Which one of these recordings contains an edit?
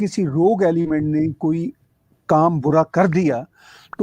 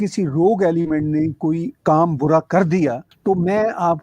second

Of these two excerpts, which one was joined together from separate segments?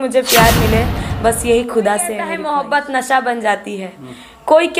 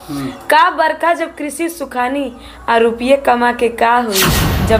first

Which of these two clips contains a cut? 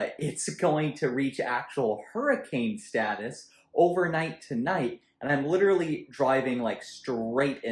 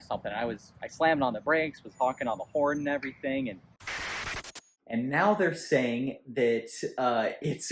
second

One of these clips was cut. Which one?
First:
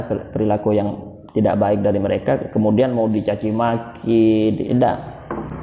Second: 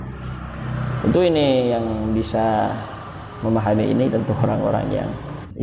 first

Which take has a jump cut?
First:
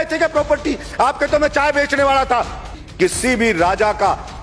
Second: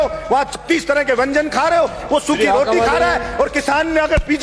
first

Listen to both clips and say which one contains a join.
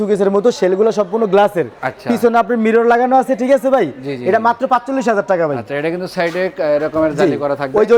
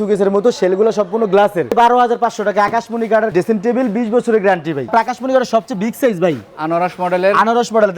second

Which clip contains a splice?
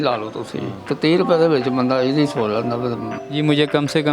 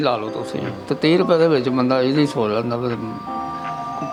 first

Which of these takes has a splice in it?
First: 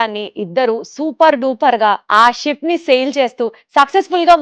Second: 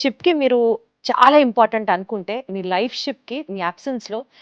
first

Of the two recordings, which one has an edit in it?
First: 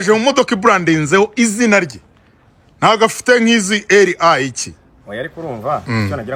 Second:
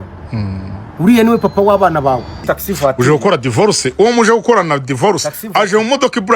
second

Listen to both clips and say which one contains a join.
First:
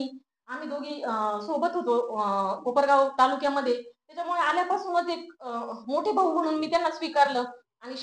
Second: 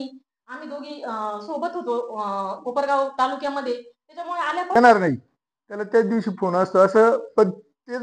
second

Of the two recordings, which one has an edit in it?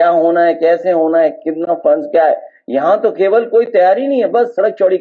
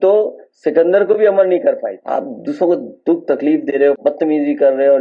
second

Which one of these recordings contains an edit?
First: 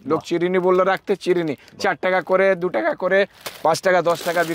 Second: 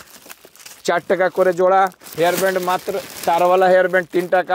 second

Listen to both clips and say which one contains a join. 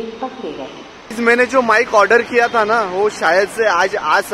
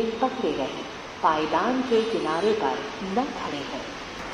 first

